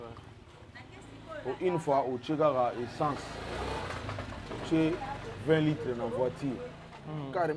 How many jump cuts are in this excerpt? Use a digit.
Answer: 0